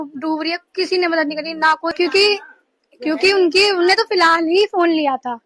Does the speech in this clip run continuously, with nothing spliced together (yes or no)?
no